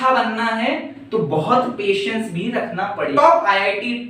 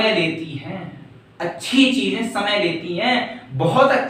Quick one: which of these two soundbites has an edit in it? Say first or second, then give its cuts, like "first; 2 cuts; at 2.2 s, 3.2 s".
first; 1 cut; at 3.1 s